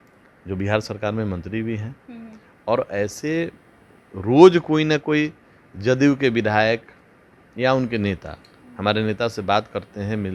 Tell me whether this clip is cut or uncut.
uncut